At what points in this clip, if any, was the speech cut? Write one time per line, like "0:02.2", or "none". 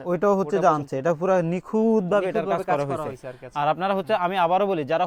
none